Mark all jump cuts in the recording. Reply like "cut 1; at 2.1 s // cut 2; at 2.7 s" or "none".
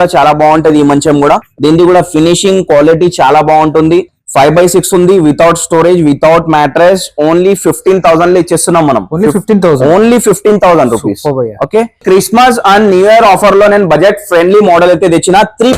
cut 1; at 1.5 s // cut 2; at 12.0 s

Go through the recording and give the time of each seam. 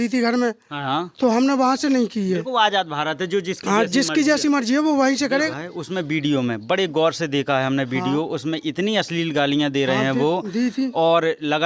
cut 1; at 5.5 s

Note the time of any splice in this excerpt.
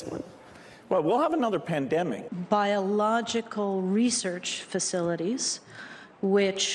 cut 1; at 2.3 s

